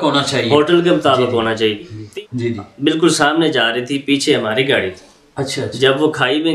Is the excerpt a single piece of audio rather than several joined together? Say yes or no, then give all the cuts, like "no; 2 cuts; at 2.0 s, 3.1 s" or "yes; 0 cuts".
no; 1 cut; at 2.0 s